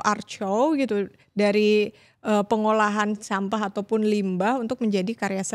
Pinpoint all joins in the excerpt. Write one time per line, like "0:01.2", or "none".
none

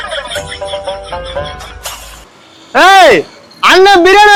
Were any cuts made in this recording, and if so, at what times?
none

